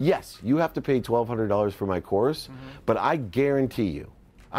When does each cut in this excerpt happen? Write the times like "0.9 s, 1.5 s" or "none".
none